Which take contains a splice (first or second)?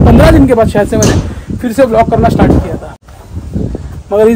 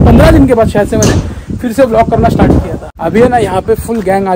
second